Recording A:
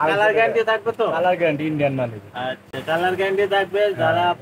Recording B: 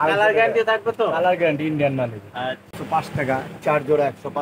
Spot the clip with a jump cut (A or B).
B